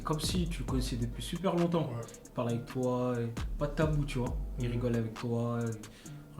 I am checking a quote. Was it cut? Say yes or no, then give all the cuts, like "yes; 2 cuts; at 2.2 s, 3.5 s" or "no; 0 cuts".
no; 0 cuts